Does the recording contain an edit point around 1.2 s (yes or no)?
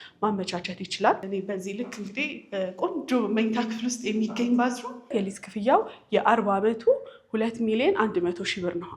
yes